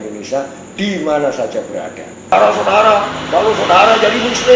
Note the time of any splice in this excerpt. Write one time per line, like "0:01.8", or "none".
0:02.3